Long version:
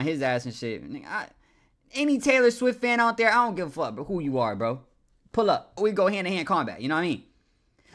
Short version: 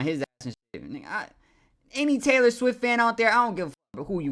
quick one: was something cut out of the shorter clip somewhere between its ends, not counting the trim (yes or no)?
no